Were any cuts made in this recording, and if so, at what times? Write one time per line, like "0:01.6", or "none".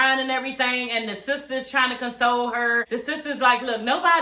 0:02.9

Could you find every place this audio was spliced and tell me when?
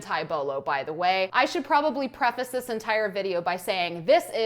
0:01.3

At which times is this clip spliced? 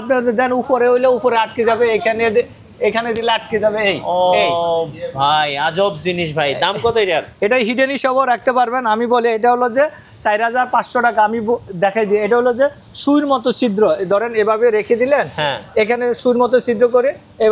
none

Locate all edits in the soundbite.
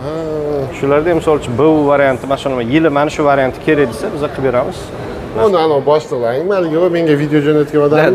0:05.4

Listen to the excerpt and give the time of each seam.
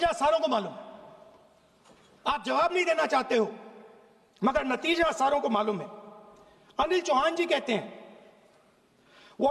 none

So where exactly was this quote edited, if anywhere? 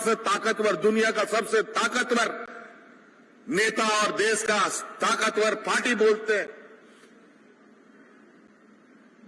none

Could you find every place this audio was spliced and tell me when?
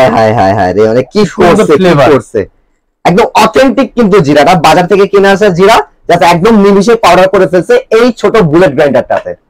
none

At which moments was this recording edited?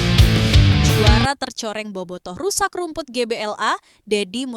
0:01.0

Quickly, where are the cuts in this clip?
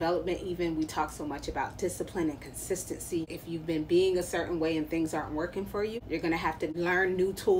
0:03.4
0:05.9
0:06.7

